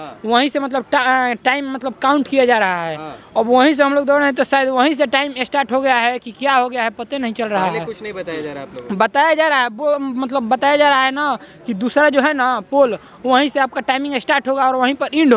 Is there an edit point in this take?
no; 0 cuts

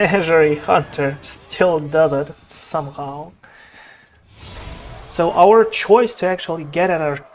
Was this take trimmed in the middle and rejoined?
no; 0 cuts

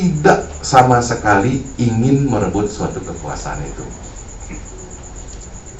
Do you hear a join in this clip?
no; 0 cuts

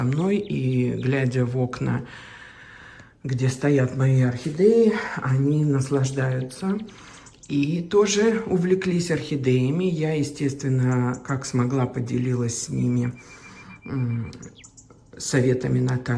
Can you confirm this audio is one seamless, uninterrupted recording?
yes; 0 cuts

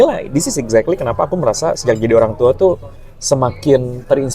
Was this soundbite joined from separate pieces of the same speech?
no; 0 cuts

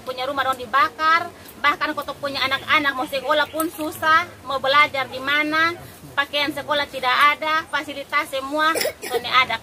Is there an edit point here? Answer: no; 0 cuts

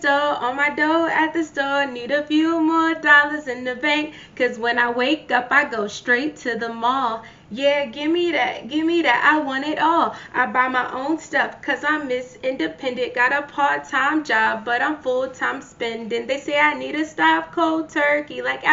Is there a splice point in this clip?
no; 0 cuts

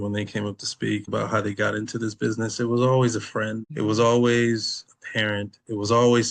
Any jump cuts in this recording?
yes; 2 cuts; at 1.0 s, 3.6 s

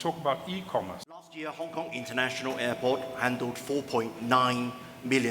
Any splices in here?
yes; 1 cut; at 1.4 s

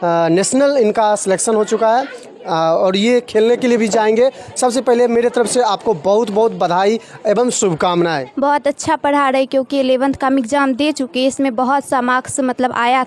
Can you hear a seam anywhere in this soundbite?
yes; 1 cut; at 8.2 s

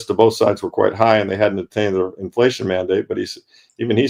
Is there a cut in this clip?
no; 0 cuts

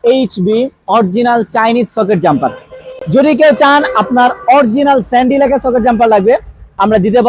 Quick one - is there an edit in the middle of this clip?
no; 0 cuts

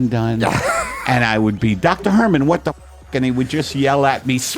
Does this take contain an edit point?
no; 0 cuts

